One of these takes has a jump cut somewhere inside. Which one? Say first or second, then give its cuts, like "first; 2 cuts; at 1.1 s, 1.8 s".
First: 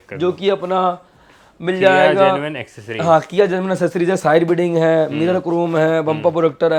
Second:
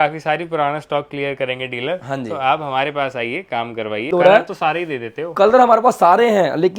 second; 1 cut; at 4.1 s